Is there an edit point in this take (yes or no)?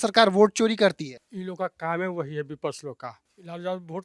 no